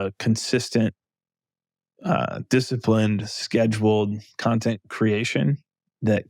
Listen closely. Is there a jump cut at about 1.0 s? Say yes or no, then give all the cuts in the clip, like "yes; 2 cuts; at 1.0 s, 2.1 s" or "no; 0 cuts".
no; 0 cuts